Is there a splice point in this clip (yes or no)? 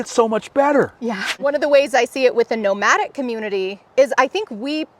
yes